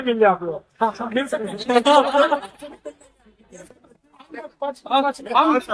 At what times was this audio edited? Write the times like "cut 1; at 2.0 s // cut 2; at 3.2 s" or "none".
none